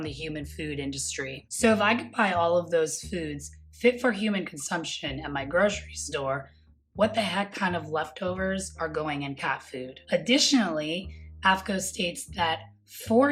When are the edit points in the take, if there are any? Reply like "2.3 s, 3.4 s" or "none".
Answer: 1.4 s